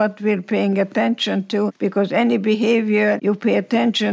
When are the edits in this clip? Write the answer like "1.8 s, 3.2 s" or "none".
1.7 s, 3.2 s

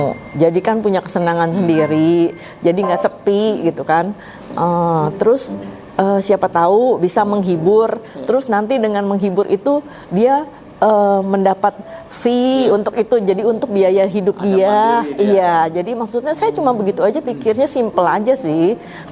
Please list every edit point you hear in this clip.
none

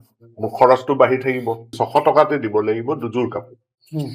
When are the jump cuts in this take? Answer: 1.7 s

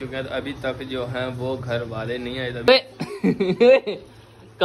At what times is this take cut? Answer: 2.7 s

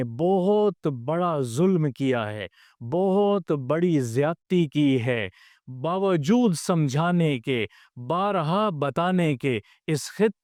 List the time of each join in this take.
none

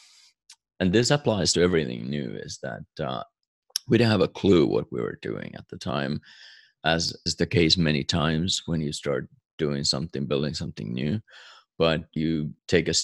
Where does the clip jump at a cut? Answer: 3.3 s

